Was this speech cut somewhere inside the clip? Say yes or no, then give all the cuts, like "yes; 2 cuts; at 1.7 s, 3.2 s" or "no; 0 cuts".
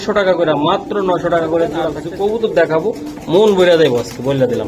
yes; 1 cut; at 2.0 s